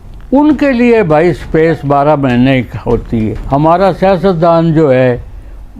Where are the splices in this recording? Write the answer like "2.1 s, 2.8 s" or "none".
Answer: 3.4 s